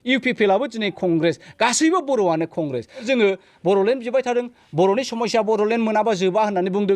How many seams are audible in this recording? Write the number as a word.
one